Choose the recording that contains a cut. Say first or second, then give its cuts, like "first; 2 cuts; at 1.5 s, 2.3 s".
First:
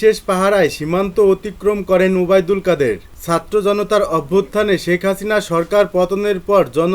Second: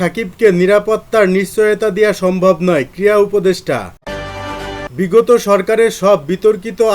second; 1 cut; at 4.4 s